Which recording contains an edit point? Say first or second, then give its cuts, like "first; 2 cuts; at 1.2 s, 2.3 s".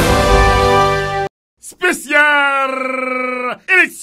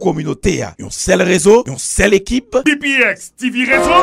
first; 1 cut; at 1.0 s